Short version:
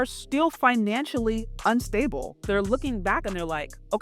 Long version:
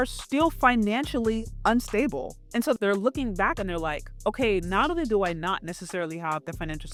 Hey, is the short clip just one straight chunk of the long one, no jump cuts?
no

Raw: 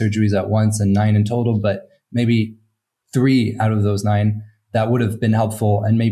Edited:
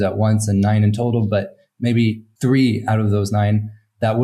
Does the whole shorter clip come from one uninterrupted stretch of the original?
no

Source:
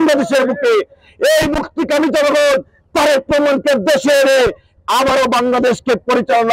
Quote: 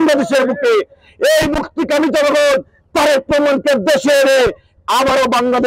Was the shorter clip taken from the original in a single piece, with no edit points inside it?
yes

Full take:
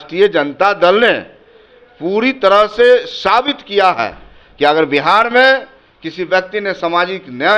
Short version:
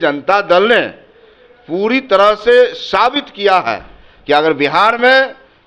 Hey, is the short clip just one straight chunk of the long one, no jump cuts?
yes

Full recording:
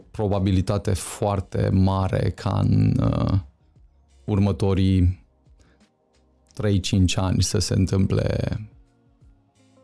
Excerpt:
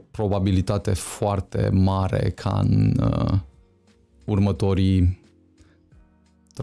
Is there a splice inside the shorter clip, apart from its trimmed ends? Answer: no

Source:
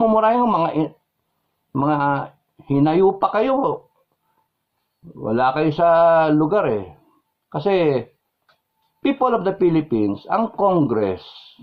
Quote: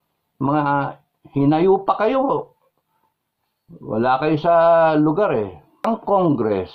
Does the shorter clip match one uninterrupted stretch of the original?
no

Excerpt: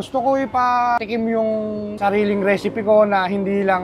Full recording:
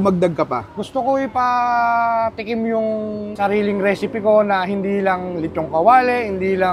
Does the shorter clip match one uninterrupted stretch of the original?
no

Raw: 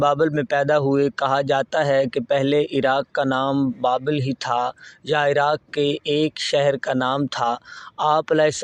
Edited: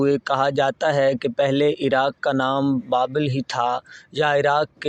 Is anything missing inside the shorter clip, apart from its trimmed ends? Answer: no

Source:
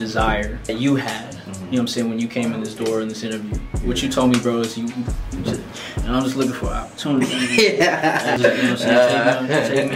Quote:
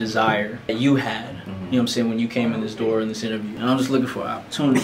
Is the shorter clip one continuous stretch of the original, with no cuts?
no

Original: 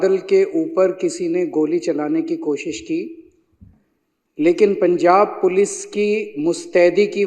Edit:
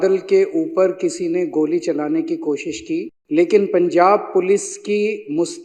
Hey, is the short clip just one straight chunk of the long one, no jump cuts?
no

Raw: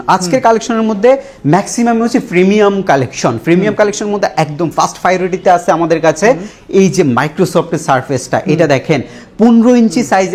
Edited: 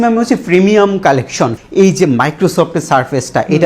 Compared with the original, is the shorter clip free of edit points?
no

